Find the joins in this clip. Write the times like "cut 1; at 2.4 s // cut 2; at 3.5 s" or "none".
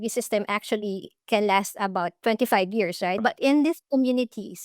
cut 1; at 3.2 s